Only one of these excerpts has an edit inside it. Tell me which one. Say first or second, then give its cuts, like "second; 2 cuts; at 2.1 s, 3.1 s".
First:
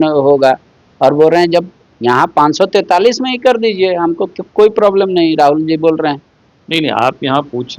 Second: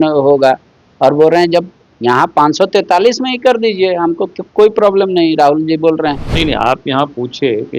second; 1 cut; at 6.3 s